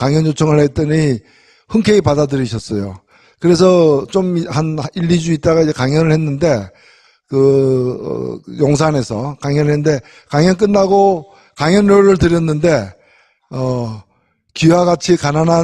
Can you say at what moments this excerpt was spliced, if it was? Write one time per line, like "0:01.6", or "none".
0:10.0

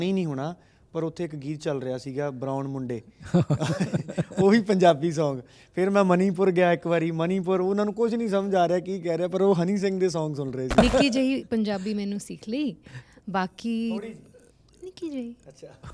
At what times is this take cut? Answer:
0:10.8

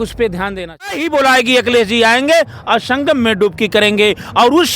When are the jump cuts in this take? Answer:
0:01.1

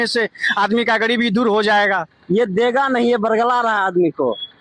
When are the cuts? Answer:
none

